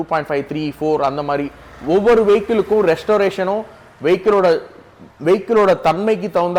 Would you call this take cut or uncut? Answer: uncut